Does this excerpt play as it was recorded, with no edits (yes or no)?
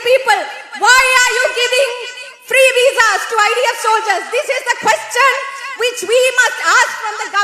yes